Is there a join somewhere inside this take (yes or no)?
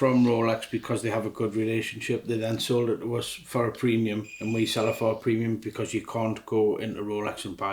no